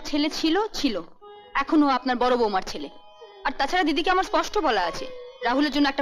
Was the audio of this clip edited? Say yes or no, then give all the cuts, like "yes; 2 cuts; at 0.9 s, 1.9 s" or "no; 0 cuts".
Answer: no; 0 cuts